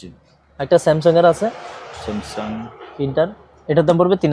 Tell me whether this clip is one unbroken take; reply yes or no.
yes